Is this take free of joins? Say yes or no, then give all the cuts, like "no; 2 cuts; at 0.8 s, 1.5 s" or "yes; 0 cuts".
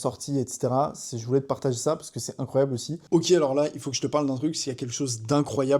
no; 1 cut; at 2.9 s